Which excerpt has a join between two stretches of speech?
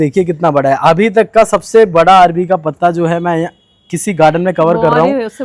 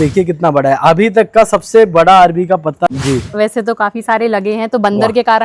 second; 1 cut; at 2.9 s

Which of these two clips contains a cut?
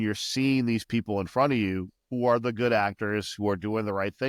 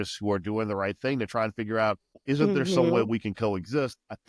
second; 1 cut; at 2.1 s

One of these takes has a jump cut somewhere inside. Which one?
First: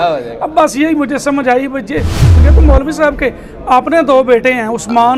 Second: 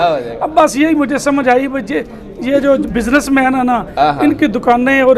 first; 1 cut; at 2.4 s

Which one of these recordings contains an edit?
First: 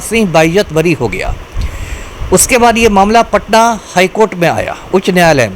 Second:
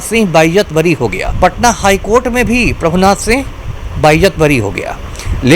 second; 1 cut; at 1.2 s

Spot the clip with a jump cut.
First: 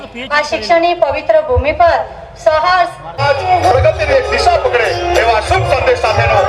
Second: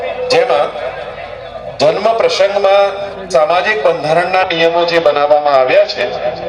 first; 1 cut; at 3.2 s

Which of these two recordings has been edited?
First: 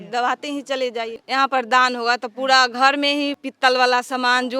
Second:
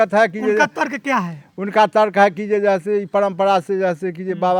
first; 2 cuts; at 1.2 s, 3.4 s

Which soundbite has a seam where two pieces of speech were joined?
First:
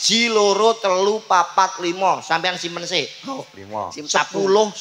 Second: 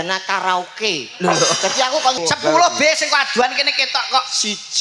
second; 1 cut; at 2.2 s

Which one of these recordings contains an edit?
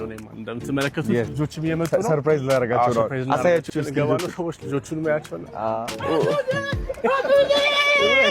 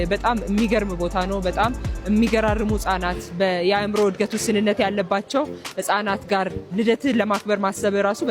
first; 2 cuts; at 1.3 s, 5.9 s

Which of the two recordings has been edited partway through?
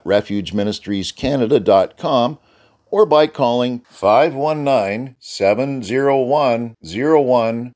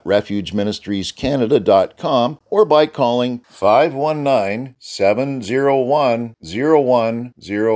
second; 1 cut; at 2.4 s

